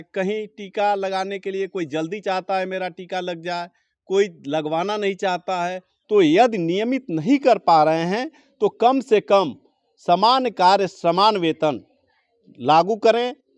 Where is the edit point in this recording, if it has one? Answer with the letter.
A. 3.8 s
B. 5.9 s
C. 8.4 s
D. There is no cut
B